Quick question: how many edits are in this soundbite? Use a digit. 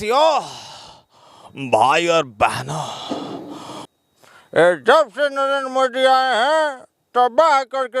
1